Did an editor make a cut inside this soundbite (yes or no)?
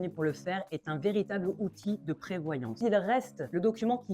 yes